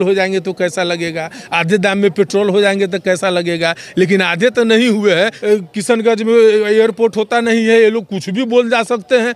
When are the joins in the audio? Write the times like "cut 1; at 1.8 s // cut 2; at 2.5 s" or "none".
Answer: cut 1; at 5.4 s